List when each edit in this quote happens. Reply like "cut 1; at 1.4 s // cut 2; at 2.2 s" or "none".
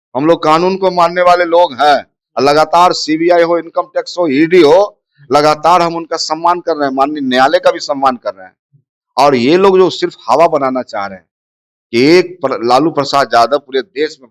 none